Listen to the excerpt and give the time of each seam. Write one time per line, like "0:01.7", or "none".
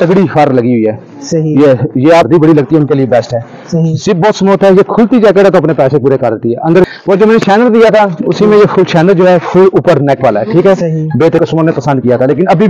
0:02.3
0:06.9
0:11.4

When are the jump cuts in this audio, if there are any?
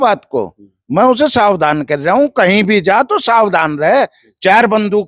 none

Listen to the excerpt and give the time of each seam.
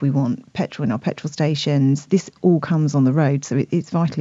0:02.1

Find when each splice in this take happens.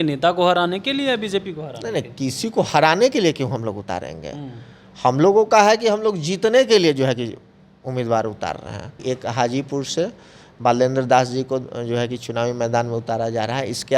0:08.9

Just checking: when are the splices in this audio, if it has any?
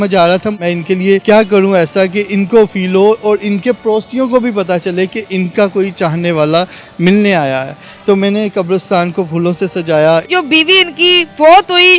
0:10.3

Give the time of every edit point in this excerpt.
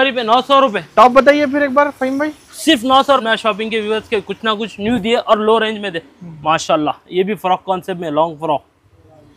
0:03.2

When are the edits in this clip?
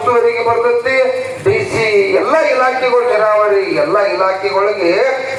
none

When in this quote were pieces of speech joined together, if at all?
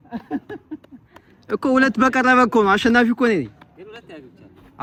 none

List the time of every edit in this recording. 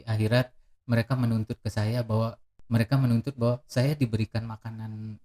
0:02.5

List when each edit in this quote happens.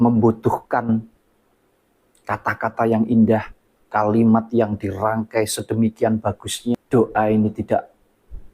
0:06.8

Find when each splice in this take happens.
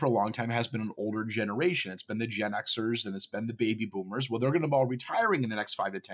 none

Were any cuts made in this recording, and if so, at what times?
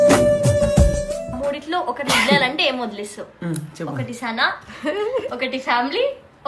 0:01.3

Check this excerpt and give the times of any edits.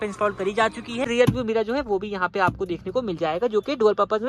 0:01.1

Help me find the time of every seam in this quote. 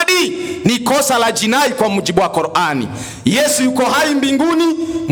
none

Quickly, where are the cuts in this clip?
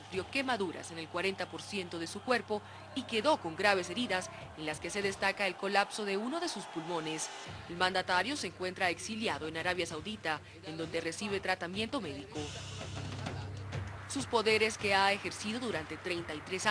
0:08.2

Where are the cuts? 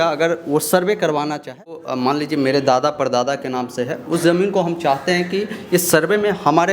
0:01.8

